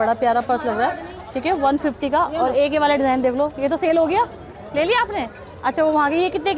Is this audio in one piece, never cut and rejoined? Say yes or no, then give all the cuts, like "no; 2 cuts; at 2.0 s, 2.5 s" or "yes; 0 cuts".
yes; 0 cuts